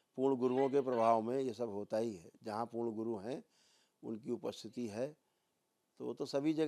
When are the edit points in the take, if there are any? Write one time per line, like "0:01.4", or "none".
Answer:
none